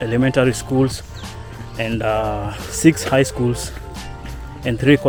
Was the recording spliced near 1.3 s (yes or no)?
no